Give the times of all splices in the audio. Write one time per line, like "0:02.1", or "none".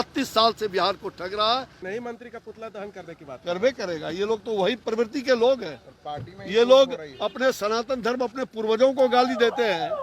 0:01.8